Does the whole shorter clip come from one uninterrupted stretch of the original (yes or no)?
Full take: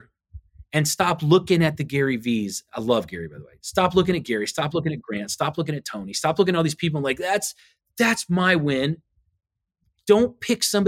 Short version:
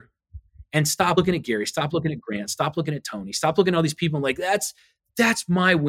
no